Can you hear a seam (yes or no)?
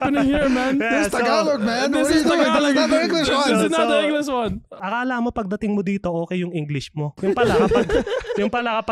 yes